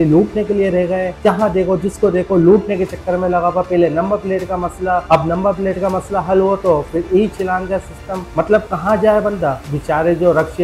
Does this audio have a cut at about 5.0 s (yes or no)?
no